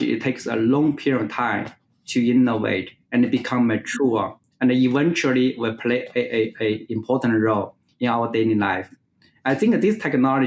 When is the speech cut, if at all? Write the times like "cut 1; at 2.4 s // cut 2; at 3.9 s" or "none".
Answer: none